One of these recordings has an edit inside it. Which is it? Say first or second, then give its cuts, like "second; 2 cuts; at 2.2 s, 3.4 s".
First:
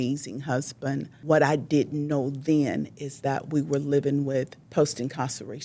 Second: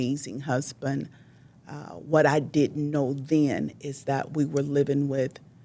first; 2 cuts; at 1.1 s, 4.6 s